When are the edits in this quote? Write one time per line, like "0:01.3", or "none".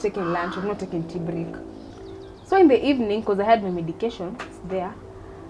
0:01.8

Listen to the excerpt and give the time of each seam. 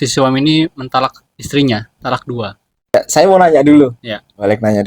0:02.9

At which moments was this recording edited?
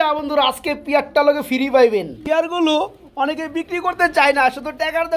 0:02.2

